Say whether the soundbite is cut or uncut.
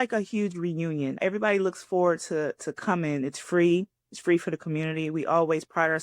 cut